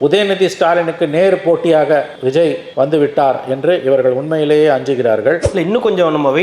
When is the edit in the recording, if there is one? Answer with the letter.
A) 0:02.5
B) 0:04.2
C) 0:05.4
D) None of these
C